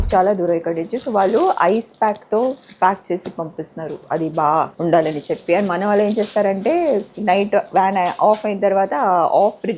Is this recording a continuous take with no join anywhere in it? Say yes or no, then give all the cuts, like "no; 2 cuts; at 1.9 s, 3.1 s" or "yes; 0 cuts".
no; 1 cut; at 4.7 s